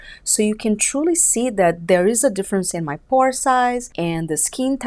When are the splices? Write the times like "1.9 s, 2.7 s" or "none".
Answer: 3.9 s